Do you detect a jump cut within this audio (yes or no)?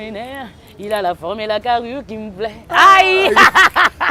no